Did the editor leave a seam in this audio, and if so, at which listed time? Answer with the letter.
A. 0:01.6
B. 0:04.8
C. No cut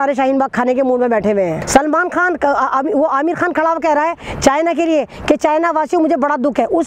A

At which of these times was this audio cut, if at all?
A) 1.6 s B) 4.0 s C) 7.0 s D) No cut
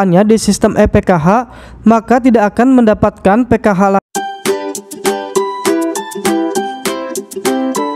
B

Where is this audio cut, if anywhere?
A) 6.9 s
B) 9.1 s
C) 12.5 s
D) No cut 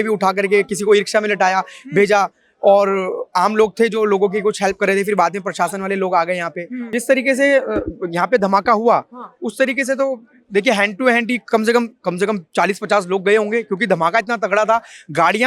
A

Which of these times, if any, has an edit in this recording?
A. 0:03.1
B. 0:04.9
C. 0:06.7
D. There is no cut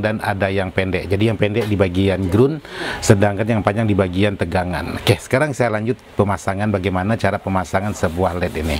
D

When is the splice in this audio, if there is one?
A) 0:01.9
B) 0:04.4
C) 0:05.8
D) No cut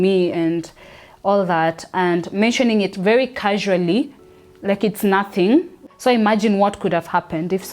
C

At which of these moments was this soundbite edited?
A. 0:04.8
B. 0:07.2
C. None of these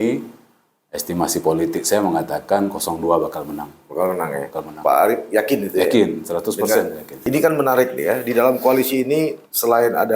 B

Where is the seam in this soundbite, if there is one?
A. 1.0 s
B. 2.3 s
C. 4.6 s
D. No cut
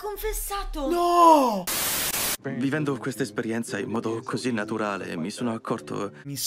B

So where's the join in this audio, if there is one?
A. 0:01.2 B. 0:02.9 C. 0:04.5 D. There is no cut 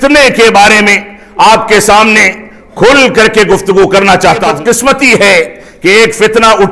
C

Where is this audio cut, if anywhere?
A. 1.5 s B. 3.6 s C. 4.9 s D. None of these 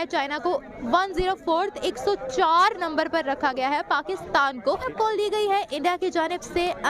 C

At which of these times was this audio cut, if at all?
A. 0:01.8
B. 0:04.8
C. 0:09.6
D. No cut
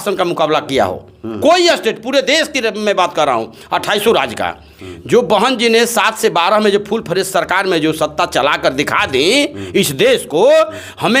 D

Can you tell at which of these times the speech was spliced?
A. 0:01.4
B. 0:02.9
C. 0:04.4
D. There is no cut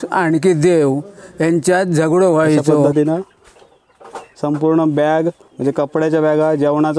B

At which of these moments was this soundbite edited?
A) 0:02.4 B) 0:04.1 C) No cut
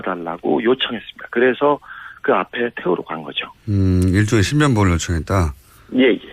B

